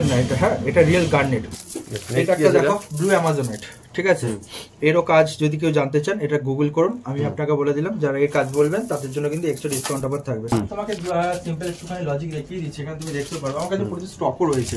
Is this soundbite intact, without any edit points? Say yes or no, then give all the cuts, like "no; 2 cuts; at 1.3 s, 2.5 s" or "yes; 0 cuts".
no; 2 cuts; at 1.5 s, 10.5 s